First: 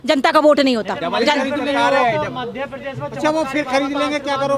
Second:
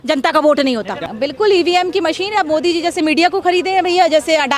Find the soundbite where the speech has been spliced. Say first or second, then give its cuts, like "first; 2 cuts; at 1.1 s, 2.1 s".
second; 1 cut; at 1.0 s